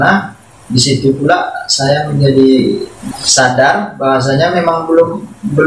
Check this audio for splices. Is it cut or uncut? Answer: cut